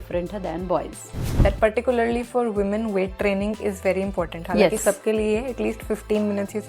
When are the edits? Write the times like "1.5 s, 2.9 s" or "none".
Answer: 1.3 s